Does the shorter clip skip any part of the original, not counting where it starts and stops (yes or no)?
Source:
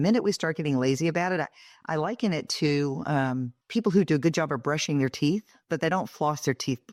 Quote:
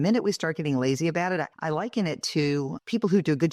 yes